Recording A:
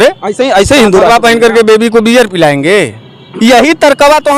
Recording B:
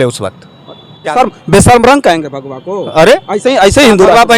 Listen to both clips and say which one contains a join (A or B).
B